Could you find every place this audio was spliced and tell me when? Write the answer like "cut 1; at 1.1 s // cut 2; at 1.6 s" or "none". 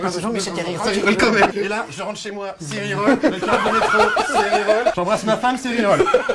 cut 1; at 1.5 s // cut 2; at 5.0 s